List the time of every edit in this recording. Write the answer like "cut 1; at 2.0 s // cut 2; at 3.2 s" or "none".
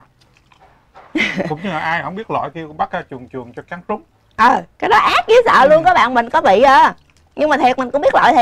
none